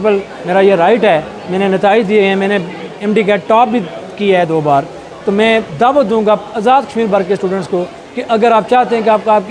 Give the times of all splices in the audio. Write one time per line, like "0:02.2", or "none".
none

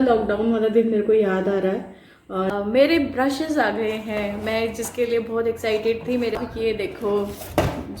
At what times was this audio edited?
0:02.5
0:06.4

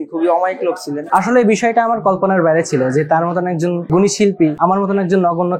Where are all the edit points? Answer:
0:01.0
0:03.8
0:04.6

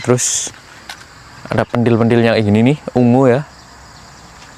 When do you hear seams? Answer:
none

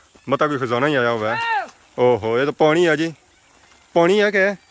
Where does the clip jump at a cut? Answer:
none

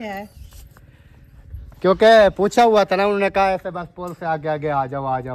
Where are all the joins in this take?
none

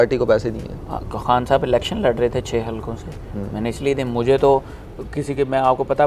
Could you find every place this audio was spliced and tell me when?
none

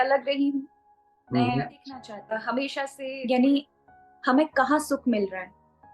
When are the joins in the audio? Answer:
0:03.0

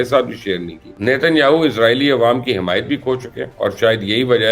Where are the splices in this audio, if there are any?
0:00.9
0:03.4

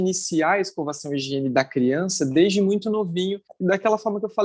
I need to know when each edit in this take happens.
none

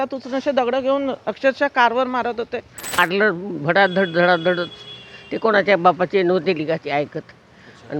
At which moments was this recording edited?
0:02.9

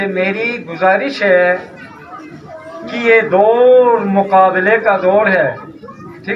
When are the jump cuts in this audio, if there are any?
none

